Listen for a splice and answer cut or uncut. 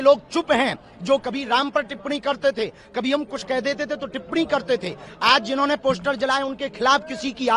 uncut